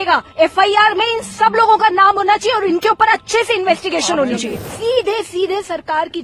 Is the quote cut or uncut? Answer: cut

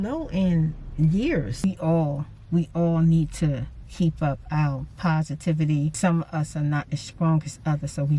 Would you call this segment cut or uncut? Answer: cut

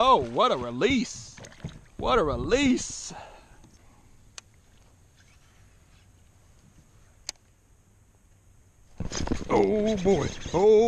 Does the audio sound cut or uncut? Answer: cut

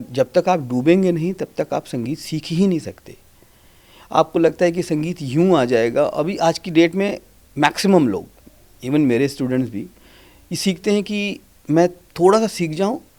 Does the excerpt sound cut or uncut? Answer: uncut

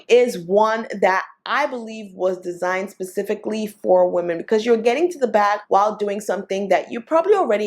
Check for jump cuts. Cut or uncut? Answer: uncut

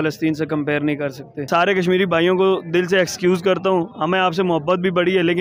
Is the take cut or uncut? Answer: cut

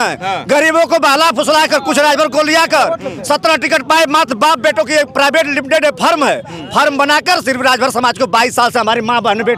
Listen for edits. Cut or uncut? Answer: uncut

